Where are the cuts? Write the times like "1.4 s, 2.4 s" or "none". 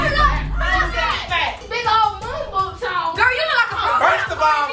1.6 s

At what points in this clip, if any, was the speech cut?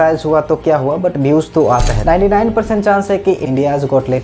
1.9 s

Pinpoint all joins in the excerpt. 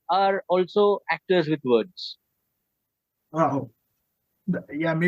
none

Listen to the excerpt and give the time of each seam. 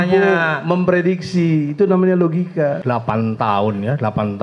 2.8 s

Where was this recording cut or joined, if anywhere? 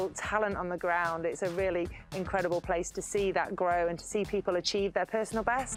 none

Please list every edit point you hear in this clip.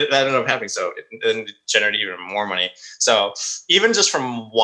none

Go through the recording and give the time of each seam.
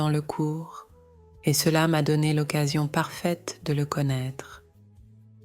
4.5 s

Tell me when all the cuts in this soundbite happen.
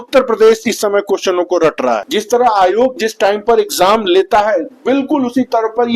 2.1 s

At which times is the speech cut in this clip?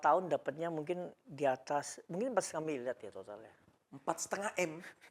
none

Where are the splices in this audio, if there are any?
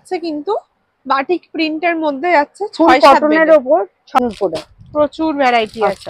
4.2 s

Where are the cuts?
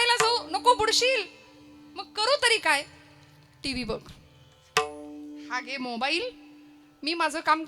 none

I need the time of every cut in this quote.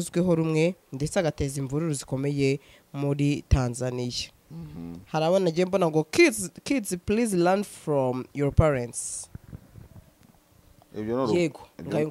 none

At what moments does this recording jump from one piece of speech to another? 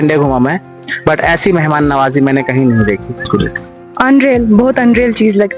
3.3 s

